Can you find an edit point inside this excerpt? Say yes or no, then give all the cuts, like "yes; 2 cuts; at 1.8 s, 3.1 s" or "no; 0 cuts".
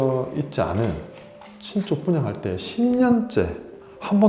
no; 0 cuts